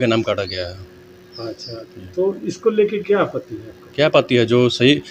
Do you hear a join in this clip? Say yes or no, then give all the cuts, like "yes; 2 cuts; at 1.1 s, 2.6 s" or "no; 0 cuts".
no; 0 cuts